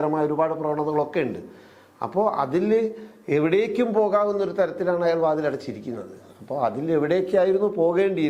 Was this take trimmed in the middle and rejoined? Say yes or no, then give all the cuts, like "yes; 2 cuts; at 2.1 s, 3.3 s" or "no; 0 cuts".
no; 0 cuts